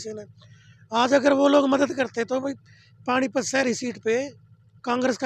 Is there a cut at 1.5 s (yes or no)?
no